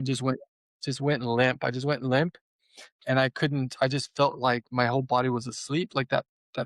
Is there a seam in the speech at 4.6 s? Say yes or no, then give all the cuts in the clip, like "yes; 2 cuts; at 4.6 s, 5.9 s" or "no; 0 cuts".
no; 0 cuts